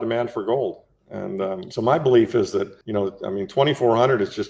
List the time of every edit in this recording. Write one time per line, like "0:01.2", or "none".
0:01.7
0:02.8